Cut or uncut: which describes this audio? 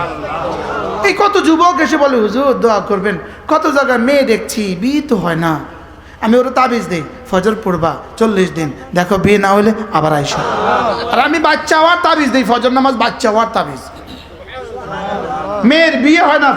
cut